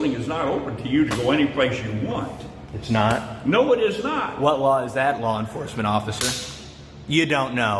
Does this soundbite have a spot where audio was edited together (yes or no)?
no